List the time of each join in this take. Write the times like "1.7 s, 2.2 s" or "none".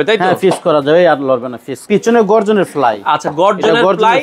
1.8 s

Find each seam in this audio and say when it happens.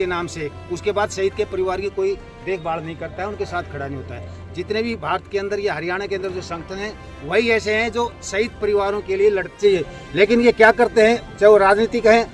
9.6 s

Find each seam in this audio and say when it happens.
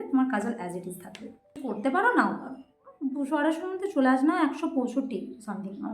1.6 s

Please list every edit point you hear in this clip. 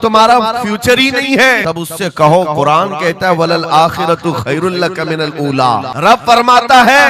1.6 s, 5.9 s

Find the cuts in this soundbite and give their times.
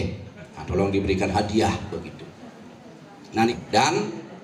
3.5 s

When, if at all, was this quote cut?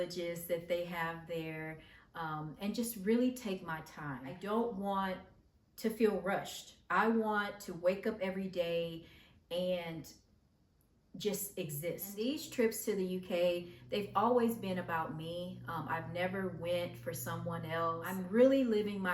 4.3 s, 12.1 s, 18.1 s

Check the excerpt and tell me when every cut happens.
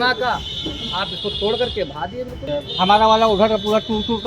2.4 s

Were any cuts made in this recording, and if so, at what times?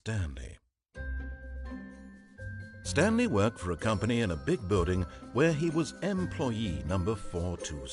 3.0 s

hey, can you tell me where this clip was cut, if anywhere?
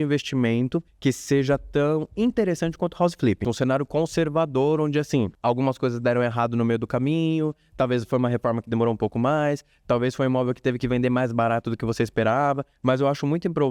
0.9 s, 3.4 s, 5.3 s, 12.7 s

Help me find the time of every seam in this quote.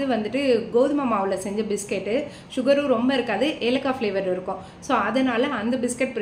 none

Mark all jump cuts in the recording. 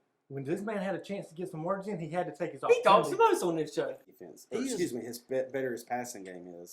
4.0 s

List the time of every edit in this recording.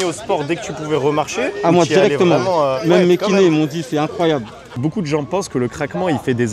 4.7 s

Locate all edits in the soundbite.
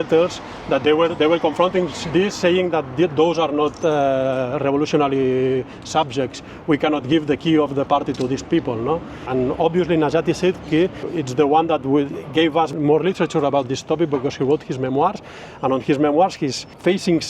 9.2 s, 11.0 s, 12.7 s, 16.3 s

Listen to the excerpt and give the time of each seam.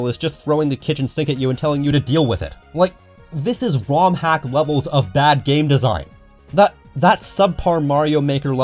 none

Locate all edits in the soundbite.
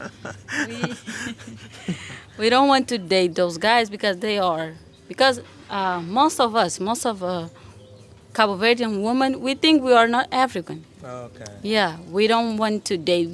none

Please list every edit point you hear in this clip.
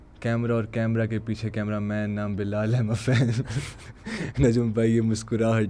none

